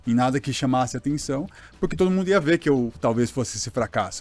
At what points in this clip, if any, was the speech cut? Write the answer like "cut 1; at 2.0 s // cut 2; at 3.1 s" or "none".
none